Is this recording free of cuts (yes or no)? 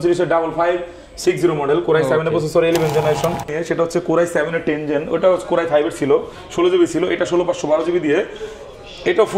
no